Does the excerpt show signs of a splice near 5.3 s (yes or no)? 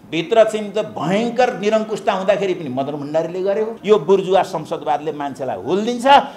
no